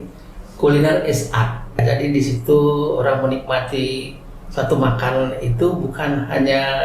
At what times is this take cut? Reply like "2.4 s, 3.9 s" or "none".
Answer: 1.8 s